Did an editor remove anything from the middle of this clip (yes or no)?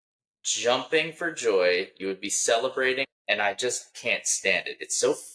yes